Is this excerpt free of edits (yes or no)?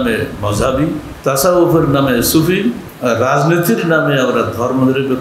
no